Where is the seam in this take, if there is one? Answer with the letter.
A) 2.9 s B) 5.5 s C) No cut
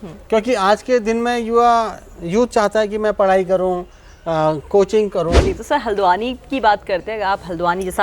B